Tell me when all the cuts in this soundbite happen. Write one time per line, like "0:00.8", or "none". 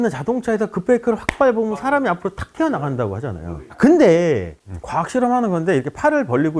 0:04.5

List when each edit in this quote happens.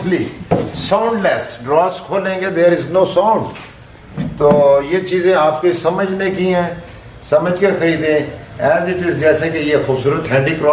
none

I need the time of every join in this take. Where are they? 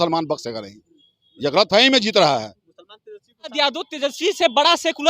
0:03.5

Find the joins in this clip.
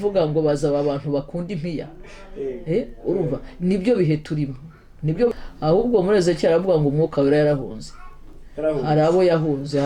0:05.3

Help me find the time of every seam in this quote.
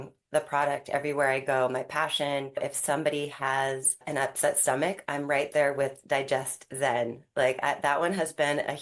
0:02.6
0:04.0

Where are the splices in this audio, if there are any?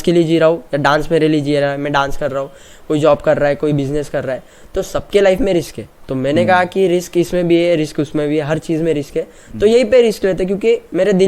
none

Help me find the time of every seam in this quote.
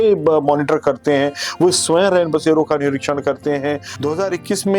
0:03.9

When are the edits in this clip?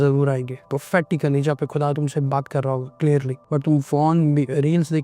0:03.4

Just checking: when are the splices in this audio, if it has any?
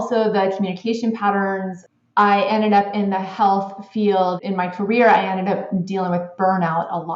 0:01.7
0:04.4

